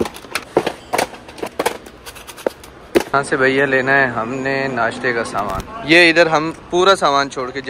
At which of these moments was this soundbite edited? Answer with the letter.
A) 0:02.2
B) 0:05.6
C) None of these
B